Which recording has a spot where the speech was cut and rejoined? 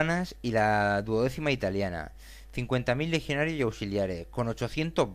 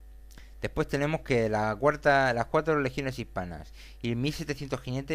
first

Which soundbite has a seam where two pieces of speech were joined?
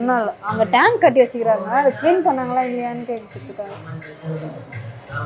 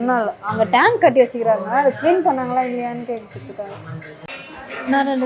second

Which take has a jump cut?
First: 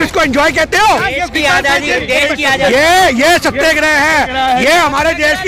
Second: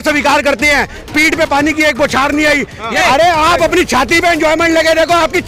second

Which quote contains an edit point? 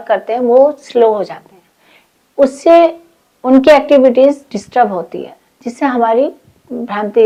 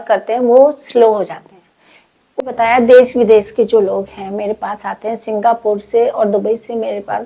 second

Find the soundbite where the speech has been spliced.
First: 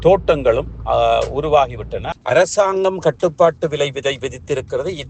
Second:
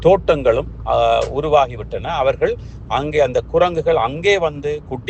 first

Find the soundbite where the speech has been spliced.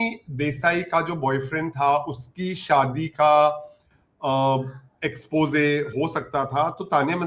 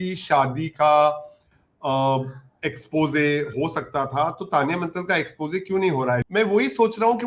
second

